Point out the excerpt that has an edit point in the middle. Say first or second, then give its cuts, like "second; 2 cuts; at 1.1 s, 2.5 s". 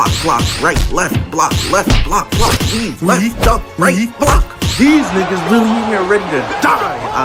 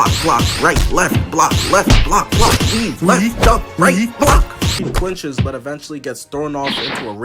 second; 1 cut; at 4.7 s